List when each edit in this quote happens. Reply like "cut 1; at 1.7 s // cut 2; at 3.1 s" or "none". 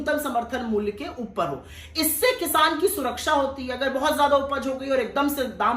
none

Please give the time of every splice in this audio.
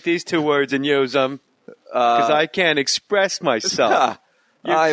cut 1; at 1.4 s

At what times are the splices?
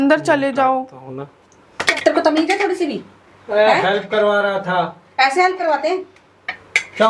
cut 1; at 2.0 s

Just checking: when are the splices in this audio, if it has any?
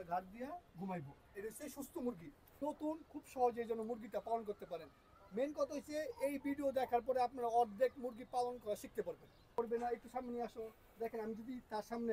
cut 1; at 2.6 s // cut 2; at 9.6 s

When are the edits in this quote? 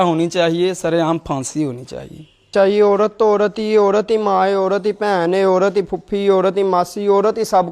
cut 1; at 2.5 s

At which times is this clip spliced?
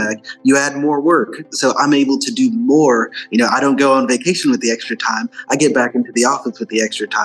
cut 1; at 1.5 s

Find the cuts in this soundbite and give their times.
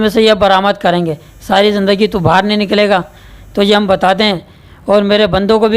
none

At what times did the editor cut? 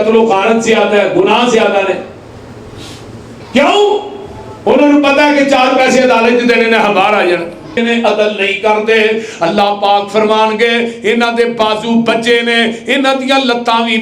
cut 1; at 7.8 s

